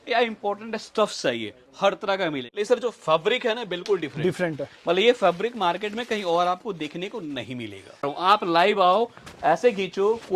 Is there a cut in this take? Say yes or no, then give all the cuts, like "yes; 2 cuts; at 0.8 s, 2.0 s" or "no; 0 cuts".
yes; 2 cuts; at 2.4 s, 8.1 s